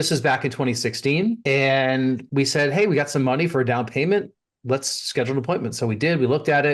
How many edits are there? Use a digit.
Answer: 0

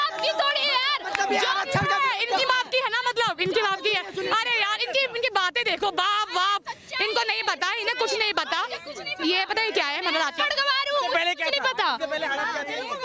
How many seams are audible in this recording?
0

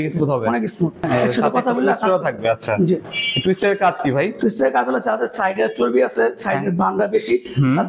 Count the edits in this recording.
1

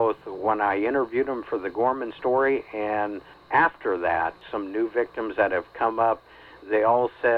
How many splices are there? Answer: 2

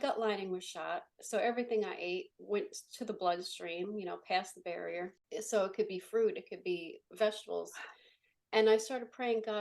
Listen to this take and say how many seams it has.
1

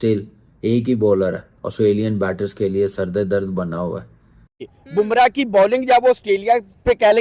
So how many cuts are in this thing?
1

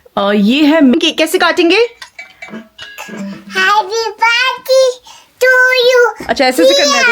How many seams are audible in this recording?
1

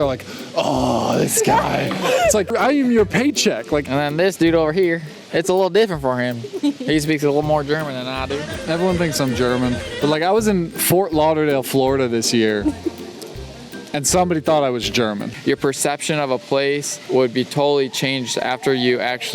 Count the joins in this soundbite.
5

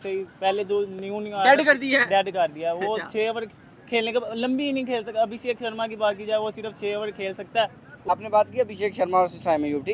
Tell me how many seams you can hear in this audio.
1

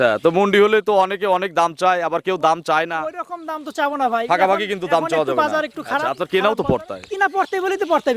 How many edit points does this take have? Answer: 1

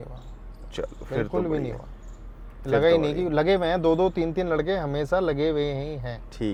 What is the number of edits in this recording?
0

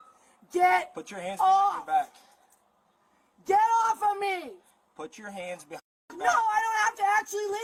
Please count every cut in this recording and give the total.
0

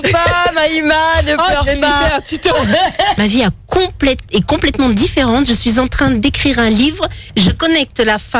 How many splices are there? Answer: 2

